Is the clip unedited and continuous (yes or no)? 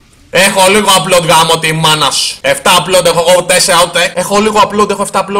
no